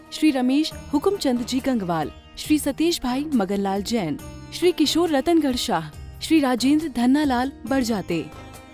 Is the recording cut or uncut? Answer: uncut